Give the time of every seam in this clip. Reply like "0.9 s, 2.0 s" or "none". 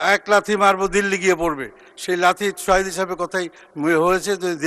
none